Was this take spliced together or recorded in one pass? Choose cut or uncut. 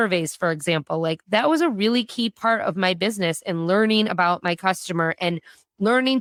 uncut